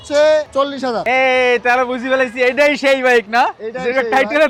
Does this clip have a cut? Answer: no; 0 cuts

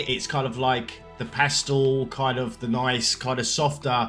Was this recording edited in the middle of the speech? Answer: no; 0 cuts

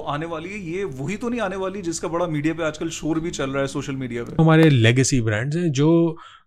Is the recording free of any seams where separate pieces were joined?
no; 1 cut; at 4.4 s

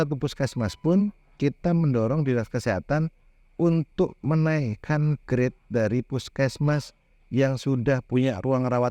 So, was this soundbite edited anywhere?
no; 0 cuts

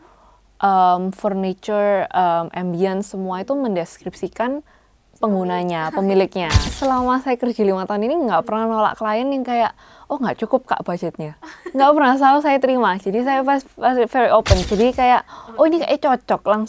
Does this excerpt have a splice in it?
yes; 2 cuts; at 6.6 s, 14.6 s

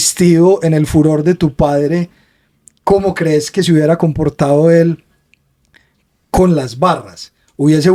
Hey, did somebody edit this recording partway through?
no; 0 cuts

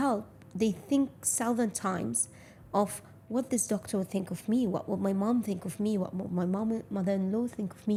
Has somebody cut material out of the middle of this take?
no; 0 cuts

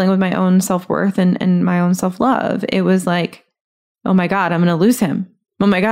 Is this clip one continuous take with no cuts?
yes; 0 cuts

